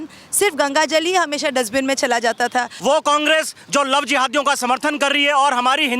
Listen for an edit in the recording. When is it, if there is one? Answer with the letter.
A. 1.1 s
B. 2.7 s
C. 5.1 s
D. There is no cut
B